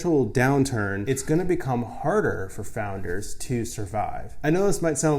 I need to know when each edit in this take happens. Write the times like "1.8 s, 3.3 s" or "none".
1.0 s